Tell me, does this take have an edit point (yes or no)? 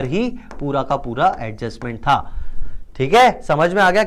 no